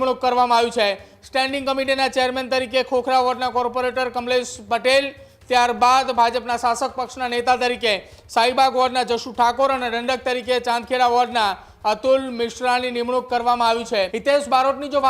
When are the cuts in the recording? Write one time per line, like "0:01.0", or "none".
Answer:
0:14.1